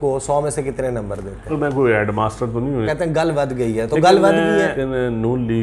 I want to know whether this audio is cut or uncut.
cut